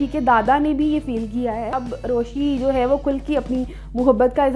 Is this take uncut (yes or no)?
no